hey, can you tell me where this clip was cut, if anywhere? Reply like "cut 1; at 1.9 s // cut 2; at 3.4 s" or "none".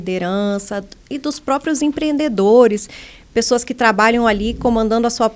none